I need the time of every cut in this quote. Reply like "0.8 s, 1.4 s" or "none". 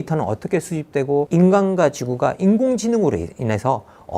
1.3 s